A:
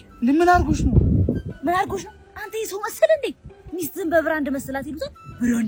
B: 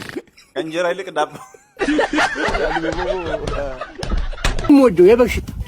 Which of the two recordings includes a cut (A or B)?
B